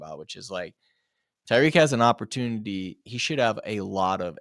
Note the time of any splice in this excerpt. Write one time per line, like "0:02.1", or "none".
0:03.1